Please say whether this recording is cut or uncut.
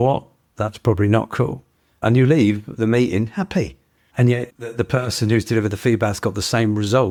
uncut